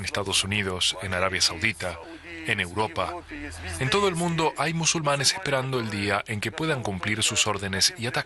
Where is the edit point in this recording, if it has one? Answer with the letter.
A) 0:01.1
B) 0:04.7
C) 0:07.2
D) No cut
B